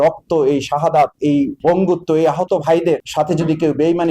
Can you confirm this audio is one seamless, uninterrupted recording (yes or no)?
no